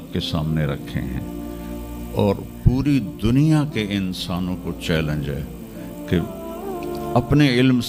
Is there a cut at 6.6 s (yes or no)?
no